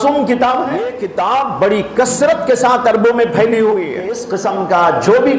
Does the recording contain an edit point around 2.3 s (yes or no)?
no